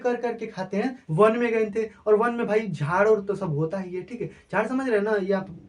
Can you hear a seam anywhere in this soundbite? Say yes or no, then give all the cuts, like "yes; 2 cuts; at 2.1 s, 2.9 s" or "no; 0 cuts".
yes; 1 cut; at 1.0 s